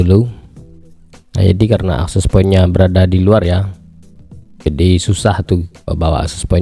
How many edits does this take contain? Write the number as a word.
zero